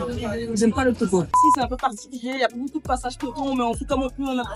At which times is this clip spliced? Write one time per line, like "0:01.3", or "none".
0:01.4

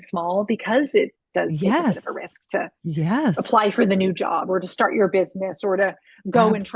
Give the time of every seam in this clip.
none

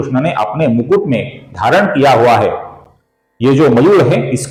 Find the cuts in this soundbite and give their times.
none

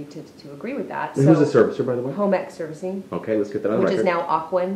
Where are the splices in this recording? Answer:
none

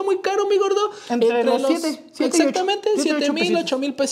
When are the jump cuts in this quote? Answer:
none

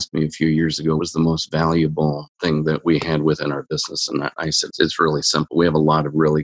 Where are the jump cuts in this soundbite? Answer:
0:01.0
0:04.7

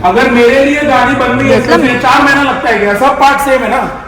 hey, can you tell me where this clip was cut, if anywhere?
0:01.9

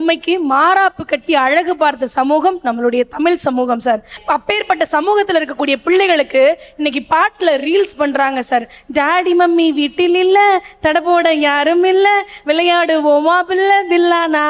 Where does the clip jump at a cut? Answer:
none

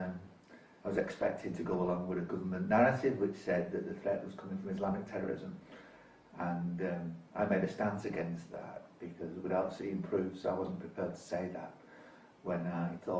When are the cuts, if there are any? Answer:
0:09.3

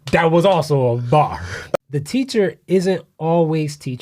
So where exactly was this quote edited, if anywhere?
0:01.8

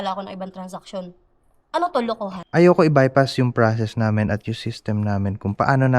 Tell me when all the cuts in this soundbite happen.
0:02.4

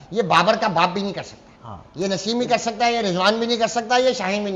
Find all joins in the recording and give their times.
none

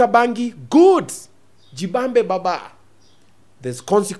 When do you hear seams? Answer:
none

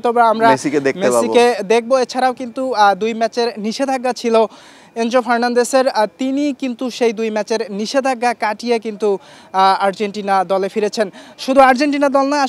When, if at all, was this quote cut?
none

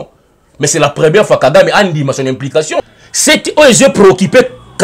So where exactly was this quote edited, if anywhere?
0:02.8

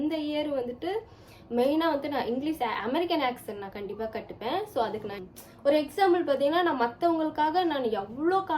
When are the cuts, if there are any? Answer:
0:05.2

